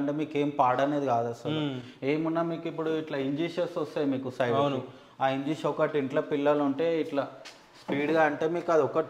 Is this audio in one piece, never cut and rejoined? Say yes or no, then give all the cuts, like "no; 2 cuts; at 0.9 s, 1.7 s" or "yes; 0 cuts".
yes; 0 cuts